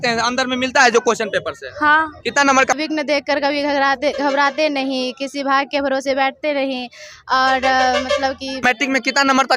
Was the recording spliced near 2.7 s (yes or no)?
yes